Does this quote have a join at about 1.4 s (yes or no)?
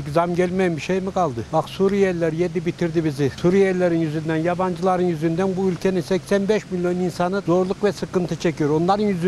yes